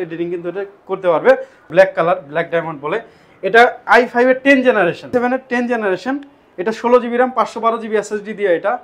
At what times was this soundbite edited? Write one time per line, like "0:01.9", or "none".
0:01.6
0:05.1